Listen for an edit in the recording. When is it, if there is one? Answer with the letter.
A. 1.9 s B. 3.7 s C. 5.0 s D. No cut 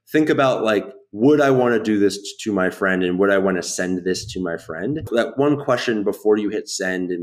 C